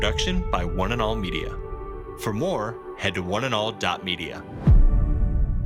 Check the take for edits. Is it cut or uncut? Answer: uncut